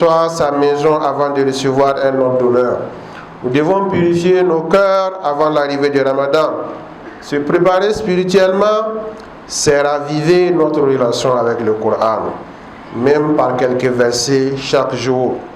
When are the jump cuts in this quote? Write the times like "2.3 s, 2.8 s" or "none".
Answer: none